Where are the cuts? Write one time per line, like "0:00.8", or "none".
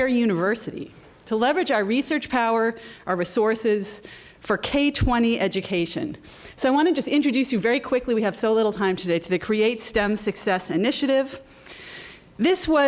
none